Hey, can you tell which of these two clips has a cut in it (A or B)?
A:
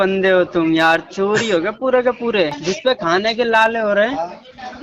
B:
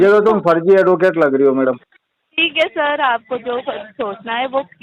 A